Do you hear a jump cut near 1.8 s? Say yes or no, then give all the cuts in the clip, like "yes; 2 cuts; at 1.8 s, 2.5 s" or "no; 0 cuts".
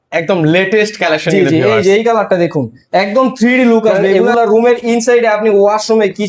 no; 1 cut; at 4.1 s